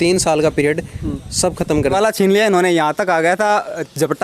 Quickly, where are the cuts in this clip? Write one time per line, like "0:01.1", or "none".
0:01.9